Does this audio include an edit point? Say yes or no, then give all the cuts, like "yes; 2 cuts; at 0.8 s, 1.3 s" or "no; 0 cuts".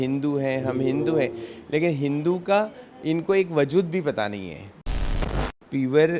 yes; 1 cut; at 5.2 s